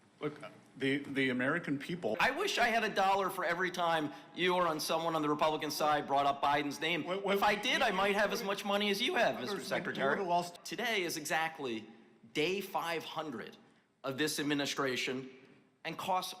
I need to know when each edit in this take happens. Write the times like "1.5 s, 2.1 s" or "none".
2.1 s, 10.6 s

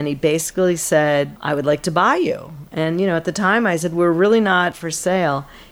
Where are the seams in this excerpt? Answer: 1.3 s, 4.8 s

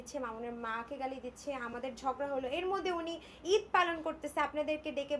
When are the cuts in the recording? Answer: none

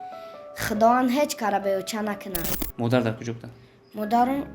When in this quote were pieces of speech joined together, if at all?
2.6 s

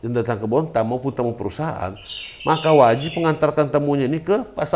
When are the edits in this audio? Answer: none

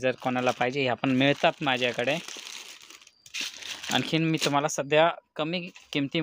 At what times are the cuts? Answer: none

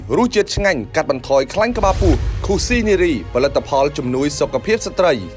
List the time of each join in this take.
none

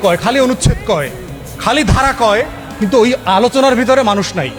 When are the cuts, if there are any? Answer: none

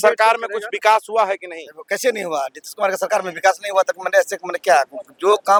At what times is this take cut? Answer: none

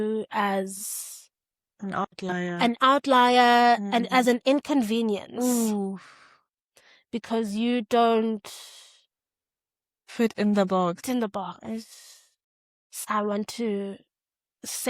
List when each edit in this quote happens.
11.0 s, 13.0 s

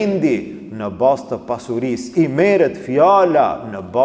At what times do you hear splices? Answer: 2.0 s

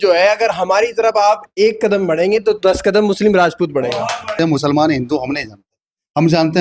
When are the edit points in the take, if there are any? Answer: 4.3 s

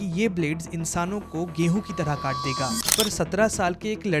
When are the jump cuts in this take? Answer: 2.9 s

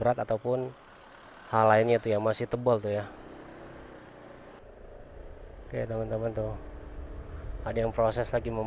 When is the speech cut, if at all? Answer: 4.6 s

